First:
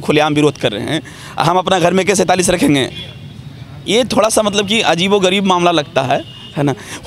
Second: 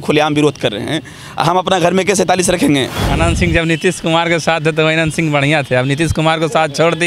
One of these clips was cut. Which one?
second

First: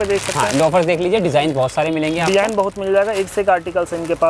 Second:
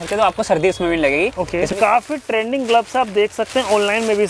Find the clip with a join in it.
second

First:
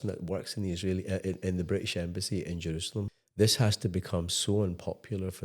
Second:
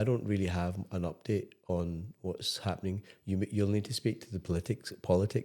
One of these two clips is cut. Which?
first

